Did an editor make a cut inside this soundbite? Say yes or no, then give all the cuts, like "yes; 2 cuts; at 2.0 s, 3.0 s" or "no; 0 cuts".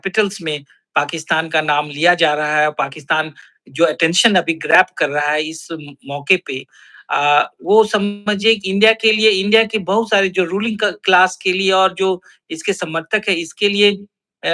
no; 0 cuts